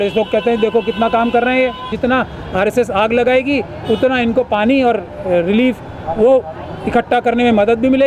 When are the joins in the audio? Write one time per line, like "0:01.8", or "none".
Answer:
0:01.9

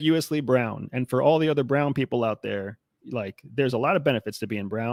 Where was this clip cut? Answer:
none

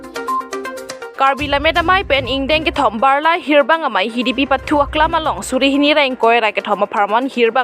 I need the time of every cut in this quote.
0:01.2

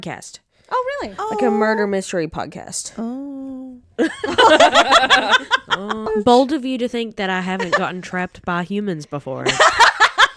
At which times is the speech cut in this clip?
0:06.1

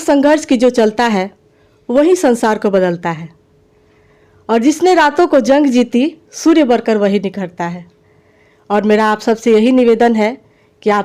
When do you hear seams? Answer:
none

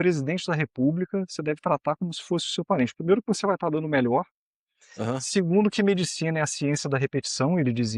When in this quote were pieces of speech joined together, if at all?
none

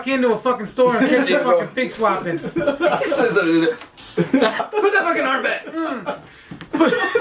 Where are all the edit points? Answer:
0:04.6

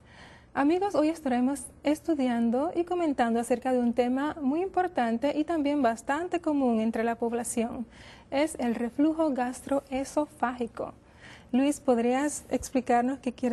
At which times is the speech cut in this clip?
0:08.6

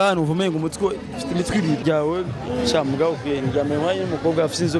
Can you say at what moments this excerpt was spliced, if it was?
0:01.8

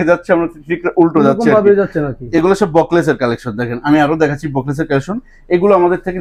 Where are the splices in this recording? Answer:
none

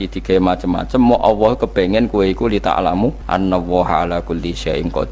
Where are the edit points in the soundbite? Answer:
0:03.2

